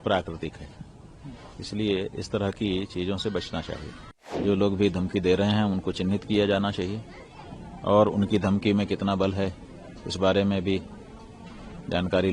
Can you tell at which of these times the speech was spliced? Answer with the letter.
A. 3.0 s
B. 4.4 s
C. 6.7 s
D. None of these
B